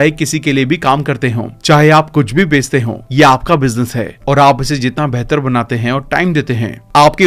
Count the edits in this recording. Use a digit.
0